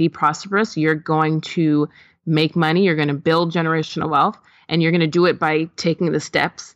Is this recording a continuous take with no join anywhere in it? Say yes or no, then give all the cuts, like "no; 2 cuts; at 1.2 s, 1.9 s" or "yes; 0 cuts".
yes; 0 cuts